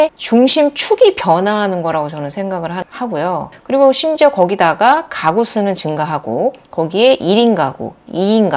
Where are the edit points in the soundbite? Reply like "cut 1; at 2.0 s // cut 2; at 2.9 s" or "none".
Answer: none

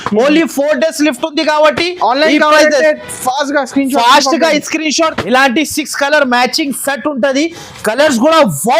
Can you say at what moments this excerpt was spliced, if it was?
cut 1; at 5.1 s

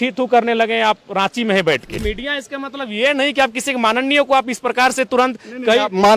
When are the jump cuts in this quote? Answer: cut 1; at 2.0 s

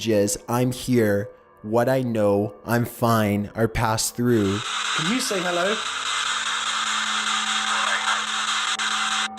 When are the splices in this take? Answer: cut 1; at 3.5 s

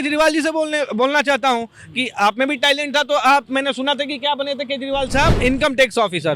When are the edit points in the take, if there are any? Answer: cut 1; at 5.4 s

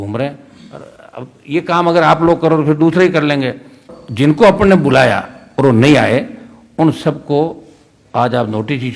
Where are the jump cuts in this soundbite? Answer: cut 1; at 4.0 s

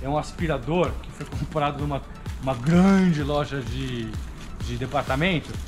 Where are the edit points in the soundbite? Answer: none

